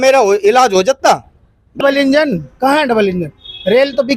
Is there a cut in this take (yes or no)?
yes